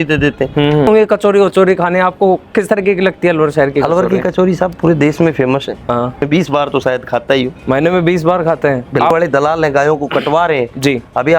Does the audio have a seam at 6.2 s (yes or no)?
yes